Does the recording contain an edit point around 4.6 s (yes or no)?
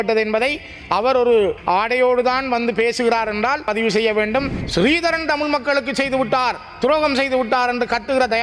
yes